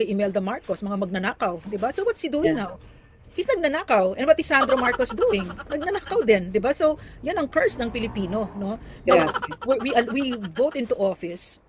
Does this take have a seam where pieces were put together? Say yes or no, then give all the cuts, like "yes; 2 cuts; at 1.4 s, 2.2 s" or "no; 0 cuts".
no; 0 cuts